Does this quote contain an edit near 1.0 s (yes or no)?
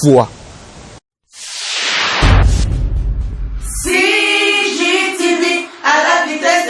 yes